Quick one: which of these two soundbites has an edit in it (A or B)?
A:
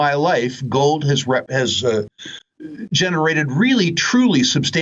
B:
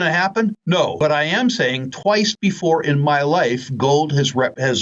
B